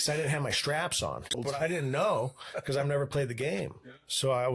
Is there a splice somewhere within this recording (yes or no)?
yes